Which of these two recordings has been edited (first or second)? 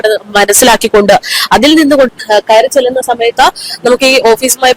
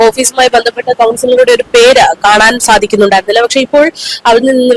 first